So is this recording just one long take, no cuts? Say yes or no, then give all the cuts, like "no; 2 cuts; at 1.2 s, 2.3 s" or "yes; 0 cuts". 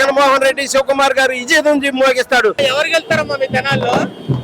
no; 1 cut; at 2.6 s